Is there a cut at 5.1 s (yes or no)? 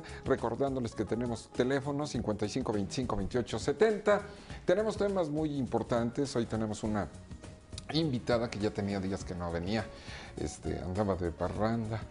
no